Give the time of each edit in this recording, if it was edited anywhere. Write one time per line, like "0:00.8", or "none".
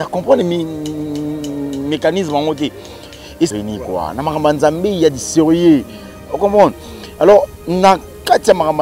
0:03.5